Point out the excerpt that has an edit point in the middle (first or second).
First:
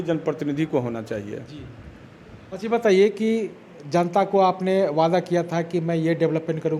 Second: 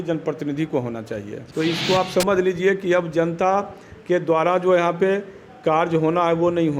second